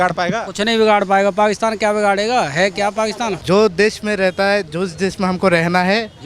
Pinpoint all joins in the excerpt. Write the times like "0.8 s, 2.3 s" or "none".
3.4 s